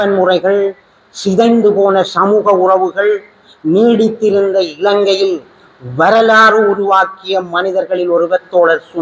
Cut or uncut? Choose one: uncut